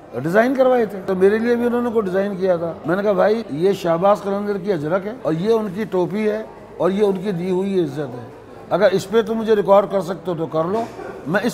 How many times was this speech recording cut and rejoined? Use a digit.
4